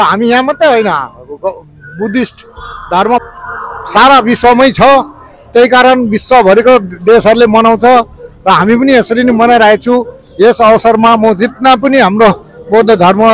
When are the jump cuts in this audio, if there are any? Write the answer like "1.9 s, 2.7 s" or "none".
none